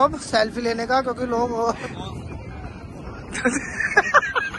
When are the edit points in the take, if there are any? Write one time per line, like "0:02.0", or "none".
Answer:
0:01.8